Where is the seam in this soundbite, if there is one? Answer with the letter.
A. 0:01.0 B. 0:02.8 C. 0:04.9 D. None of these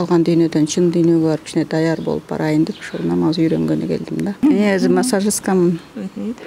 D